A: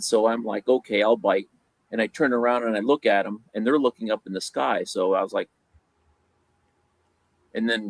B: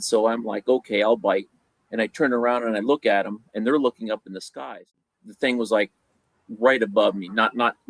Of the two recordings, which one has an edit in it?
B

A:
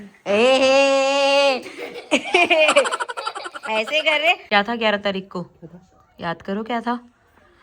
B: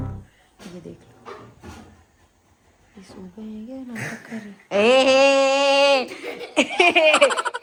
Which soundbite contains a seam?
A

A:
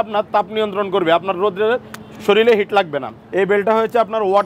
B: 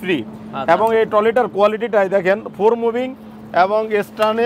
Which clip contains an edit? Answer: A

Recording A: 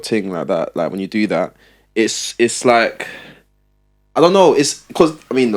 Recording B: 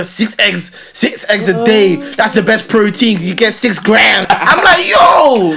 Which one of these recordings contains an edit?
B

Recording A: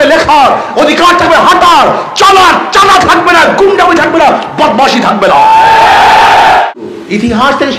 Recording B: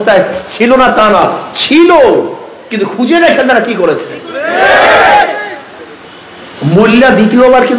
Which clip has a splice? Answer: A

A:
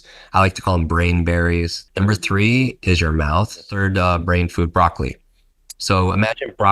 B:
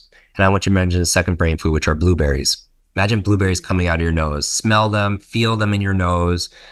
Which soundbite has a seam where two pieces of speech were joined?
A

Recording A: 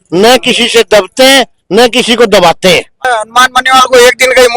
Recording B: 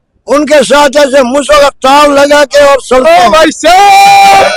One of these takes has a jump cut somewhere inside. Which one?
A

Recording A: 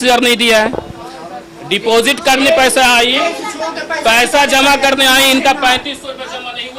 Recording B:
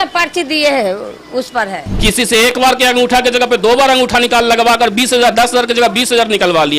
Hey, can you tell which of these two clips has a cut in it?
B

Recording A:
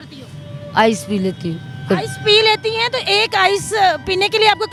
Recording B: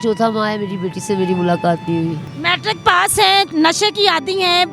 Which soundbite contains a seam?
B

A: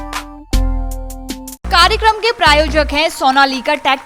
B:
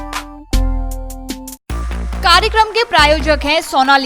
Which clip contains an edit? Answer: A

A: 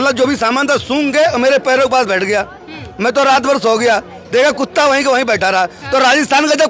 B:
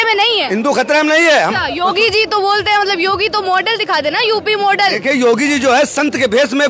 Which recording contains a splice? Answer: B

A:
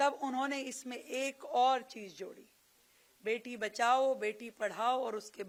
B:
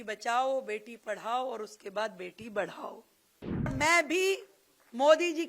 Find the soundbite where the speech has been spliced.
B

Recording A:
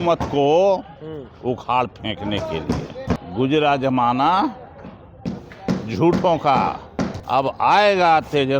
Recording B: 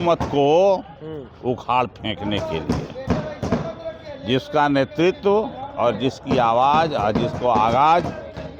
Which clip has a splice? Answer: A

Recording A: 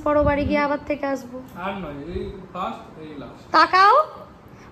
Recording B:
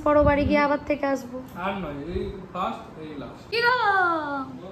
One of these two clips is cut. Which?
B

